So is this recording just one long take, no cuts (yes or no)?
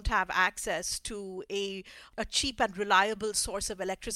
yes